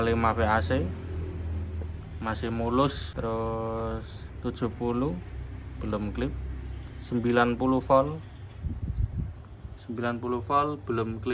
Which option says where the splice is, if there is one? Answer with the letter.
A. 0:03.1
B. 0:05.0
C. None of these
A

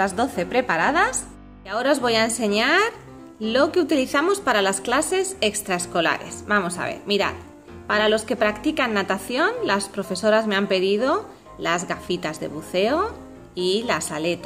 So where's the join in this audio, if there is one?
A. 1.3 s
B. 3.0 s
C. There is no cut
A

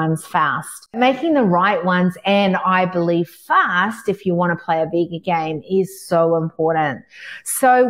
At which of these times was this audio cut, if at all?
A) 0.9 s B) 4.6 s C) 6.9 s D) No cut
A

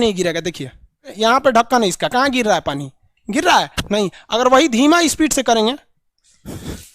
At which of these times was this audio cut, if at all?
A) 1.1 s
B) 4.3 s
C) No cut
A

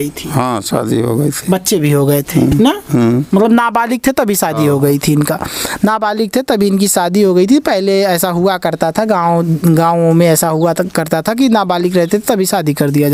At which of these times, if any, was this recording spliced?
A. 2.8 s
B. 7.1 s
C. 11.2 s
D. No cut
D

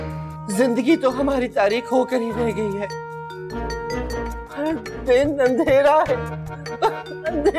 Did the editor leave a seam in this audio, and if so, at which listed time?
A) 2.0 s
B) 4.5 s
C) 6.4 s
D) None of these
B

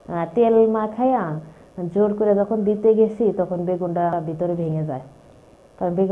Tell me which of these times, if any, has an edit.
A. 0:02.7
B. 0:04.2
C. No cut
B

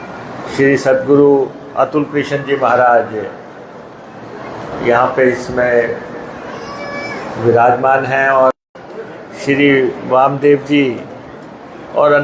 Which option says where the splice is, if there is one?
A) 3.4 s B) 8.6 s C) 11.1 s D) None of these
B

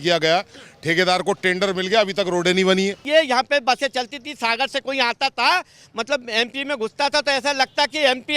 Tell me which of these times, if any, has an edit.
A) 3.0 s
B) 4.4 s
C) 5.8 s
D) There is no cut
A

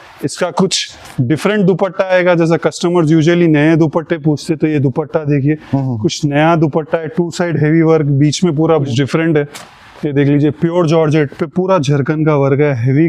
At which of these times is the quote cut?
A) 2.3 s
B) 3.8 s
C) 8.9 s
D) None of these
C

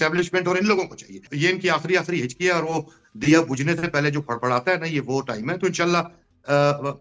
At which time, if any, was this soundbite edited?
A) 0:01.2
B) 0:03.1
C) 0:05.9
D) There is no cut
A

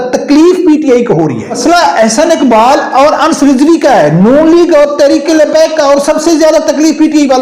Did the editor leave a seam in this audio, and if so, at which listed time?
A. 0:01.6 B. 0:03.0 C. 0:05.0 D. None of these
A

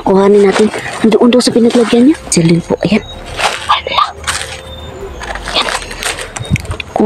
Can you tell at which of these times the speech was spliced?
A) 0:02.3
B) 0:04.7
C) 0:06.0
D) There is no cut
A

